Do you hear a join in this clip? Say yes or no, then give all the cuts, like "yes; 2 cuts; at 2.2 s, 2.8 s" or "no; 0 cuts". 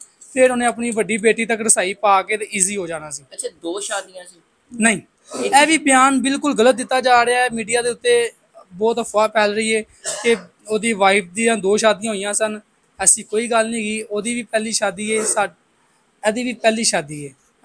no; 0 cuts